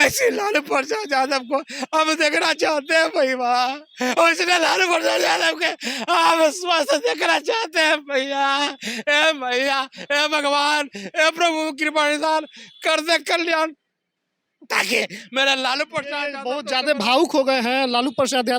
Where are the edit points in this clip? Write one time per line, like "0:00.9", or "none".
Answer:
none